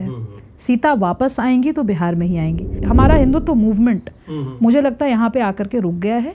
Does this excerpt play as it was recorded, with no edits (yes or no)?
no